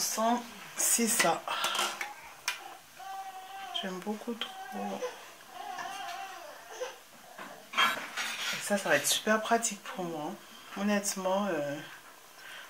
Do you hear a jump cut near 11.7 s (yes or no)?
no